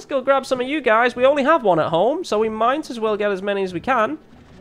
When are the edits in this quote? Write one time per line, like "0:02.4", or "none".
none